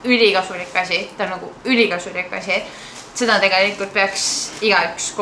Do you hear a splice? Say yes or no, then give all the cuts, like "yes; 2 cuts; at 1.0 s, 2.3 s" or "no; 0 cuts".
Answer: no; 0 cuts